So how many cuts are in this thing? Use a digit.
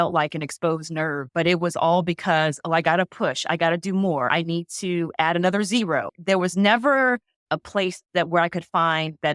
4